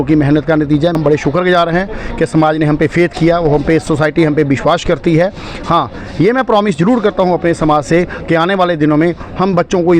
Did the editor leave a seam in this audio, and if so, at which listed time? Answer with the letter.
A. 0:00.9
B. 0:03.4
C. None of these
A